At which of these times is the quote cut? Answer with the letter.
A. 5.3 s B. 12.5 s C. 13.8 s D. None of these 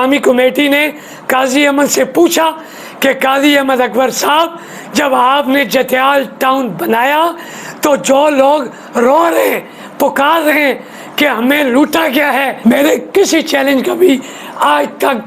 B